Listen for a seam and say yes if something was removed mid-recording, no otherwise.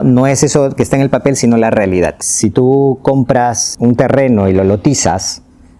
yes